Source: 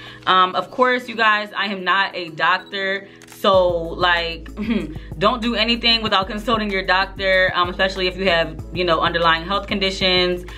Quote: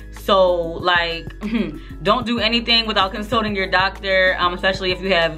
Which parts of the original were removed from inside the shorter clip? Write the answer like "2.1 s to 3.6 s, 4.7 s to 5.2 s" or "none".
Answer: none

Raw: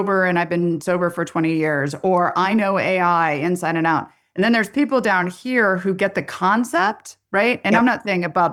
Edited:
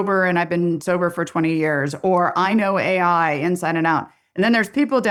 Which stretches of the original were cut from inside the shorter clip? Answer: none

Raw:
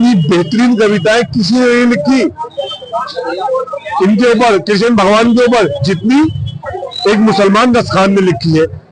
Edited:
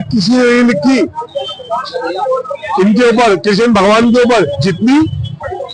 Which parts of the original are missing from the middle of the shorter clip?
none

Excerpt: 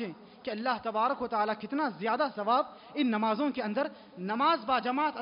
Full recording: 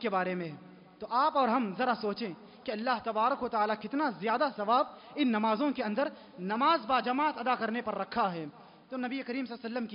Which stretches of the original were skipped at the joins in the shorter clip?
none

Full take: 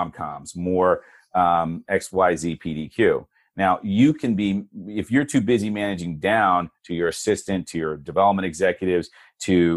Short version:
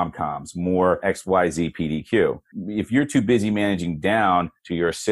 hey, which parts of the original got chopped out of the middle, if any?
1.0 s to 1.9 s, 3.4 s to 4.7 s

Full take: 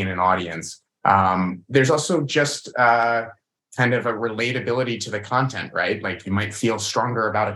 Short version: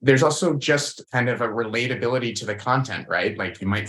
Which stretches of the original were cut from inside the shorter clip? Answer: 2.6 s to 3.6 s

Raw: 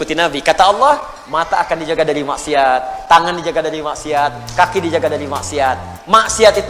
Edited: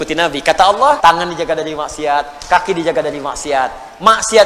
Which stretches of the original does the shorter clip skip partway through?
1.0 s to 3.0 s

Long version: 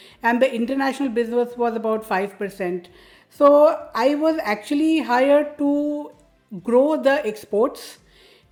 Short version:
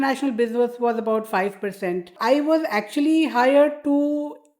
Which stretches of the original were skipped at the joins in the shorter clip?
2.9 s to 3.9 s

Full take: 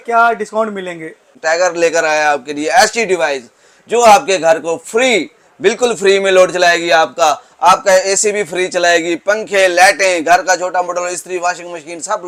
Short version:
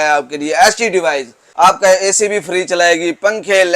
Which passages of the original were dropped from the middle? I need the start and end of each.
3.6 s to 7.5 s

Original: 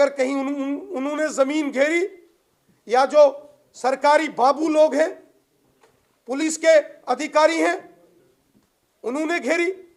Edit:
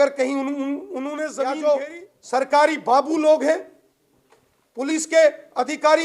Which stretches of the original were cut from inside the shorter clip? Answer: 1.3 s to 2.9 s

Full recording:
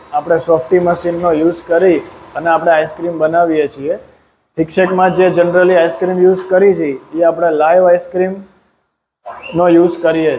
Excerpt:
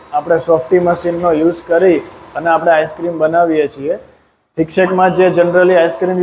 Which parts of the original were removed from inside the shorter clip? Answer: none

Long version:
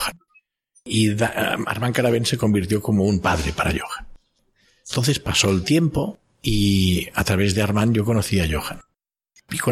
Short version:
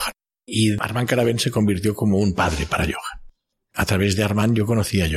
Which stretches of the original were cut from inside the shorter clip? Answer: 0.8 s to 1.7 s, 4.6 s to 7.1 s

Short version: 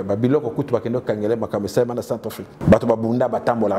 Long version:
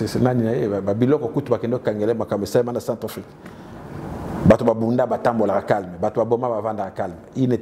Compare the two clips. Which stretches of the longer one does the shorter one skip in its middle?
3.3 s to 4.3 s

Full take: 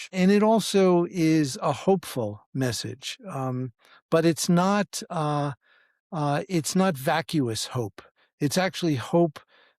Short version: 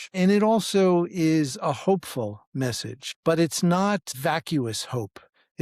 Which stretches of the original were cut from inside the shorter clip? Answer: 3.0 s to 3.9 s, 5.0 s to 7.0 s

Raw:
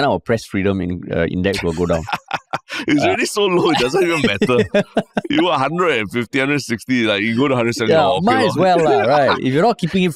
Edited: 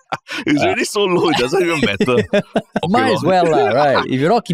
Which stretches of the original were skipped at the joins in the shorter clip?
5.3 s to 8.2 s

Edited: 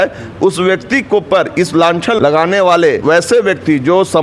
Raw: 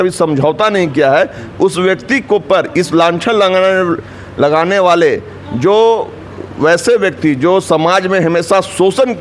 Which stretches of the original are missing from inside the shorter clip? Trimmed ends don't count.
3.4 s to 4.4 s, 5.2 s to 6.6 s

